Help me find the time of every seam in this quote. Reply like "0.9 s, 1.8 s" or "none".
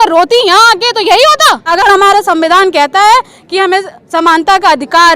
1.7 s